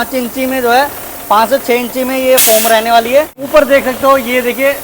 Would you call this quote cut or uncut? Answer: cut